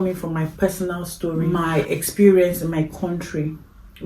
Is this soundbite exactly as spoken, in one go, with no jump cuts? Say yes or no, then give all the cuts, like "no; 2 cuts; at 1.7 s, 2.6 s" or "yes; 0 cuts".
no; 1 cut; at 1.4 s